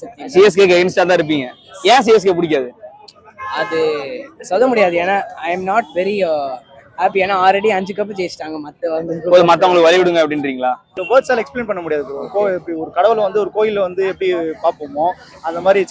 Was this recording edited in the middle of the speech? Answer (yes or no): yes